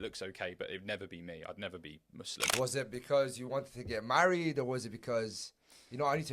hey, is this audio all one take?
no; 1 cut; at 2.5 s

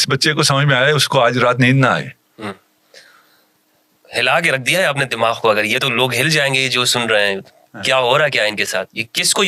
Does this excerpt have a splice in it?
no; 0 cuts

